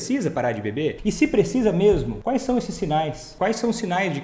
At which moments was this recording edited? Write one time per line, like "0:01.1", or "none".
0:01.0
0:02.1
0:03.2